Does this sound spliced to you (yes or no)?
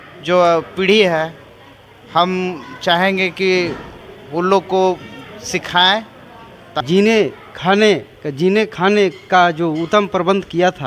yes